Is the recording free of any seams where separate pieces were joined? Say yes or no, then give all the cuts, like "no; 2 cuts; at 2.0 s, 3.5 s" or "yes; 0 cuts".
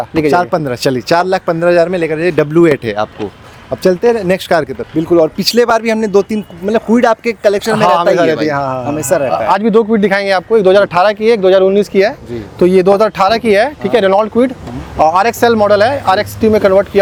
yes; 0 cuts